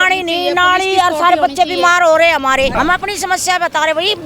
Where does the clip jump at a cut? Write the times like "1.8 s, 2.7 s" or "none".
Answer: 2.7 s